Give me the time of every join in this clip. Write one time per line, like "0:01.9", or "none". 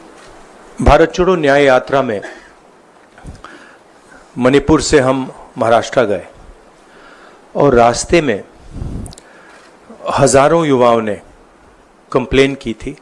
none